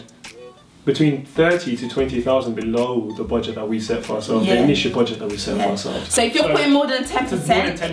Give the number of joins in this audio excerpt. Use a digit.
1